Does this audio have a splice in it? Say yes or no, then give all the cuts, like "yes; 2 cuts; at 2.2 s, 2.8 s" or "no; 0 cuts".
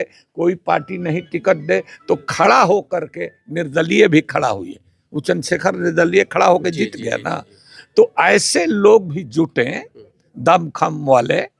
no; 0 cuts